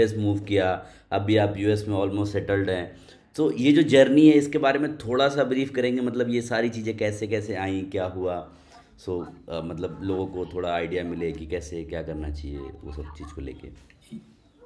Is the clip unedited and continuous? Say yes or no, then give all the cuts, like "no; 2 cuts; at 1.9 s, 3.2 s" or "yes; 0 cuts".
yes; 0 cuts